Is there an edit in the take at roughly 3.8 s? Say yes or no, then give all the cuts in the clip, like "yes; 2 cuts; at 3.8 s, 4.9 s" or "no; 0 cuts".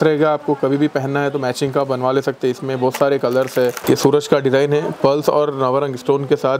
yes; 1 cut; at 3.8 s